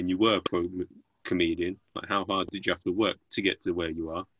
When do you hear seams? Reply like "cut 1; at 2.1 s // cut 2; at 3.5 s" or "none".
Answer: none